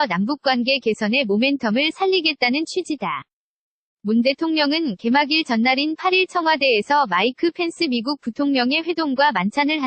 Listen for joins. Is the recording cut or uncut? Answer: uncut